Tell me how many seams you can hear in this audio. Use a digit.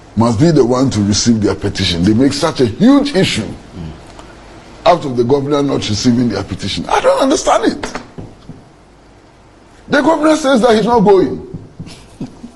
0